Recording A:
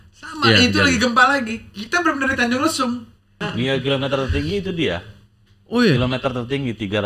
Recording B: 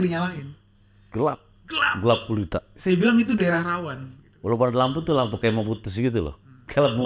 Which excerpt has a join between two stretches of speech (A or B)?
A